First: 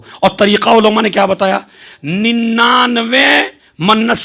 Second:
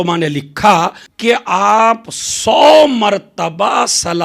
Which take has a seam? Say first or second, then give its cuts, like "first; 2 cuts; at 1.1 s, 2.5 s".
second; 1 cut; at 1.1 s